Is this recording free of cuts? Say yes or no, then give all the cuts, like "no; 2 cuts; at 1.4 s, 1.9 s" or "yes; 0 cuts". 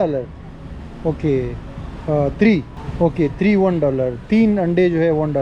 no; 1 cut; at 2.8 s